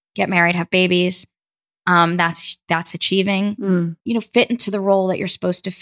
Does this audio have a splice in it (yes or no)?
no